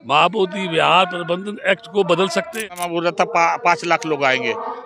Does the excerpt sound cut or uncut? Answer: cut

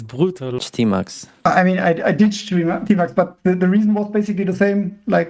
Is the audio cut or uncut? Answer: cut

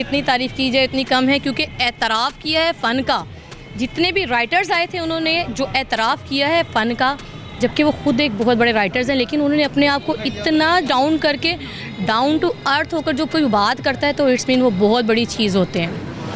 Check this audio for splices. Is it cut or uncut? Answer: uncut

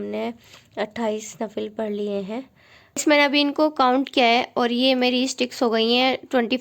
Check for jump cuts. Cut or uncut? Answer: cut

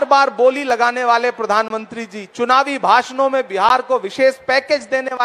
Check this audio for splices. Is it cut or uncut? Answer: uncut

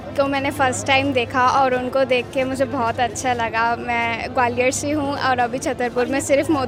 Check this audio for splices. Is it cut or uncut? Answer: uncut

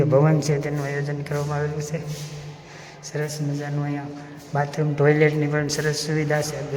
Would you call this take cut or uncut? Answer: uncut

